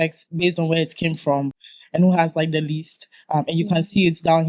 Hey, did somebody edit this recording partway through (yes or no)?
no